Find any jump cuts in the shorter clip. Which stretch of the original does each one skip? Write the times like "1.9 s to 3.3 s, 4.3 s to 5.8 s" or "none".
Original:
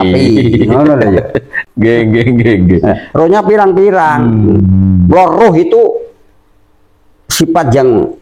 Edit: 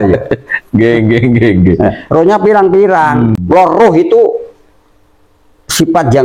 4.4 s to 5.0 s